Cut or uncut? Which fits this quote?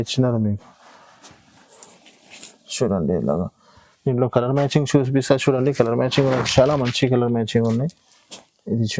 uncut